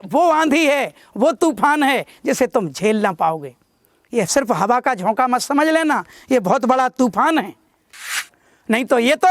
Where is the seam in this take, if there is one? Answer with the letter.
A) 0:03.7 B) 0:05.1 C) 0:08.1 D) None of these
C